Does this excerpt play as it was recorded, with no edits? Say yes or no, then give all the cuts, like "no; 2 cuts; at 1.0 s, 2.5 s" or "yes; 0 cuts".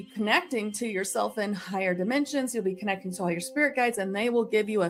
yes; 0 cuts